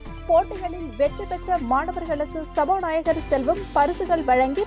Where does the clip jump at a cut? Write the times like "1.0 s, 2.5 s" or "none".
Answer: none